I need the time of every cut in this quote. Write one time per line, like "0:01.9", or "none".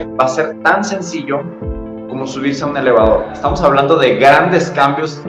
0:03.3